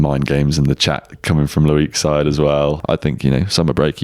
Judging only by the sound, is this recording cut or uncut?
cut